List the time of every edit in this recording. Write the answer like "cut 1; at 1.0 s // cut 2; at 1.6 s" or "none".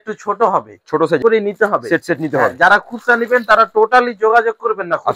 cut 1; at 1.2 s